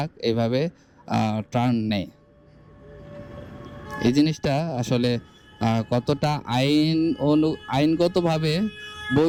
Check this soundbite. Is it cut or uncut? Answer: uncut